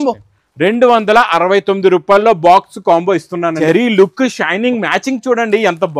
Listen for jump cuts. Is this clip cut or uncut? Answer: cut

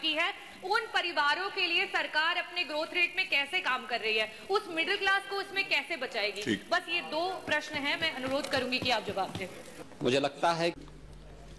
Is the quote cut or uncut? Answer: uncut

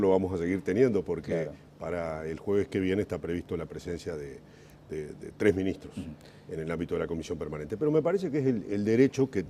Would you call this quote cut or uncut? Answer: cut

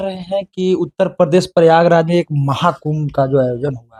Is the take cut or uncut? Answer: uncut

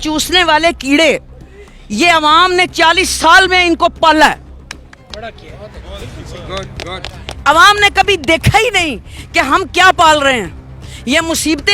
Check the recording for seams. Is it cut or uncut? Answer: uncut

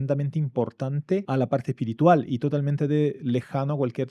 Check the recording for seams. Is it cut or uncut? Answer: cut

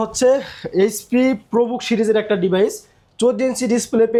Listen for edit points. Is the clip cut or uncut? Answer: uncut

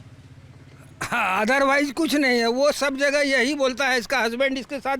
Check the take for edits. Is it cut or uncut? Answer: uncut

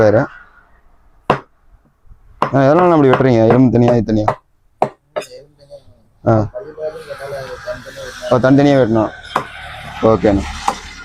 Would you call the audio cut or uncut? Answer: uncut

